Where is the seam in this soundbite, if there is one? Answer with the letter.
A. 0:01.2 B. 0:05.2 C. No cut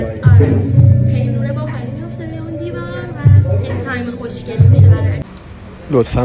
B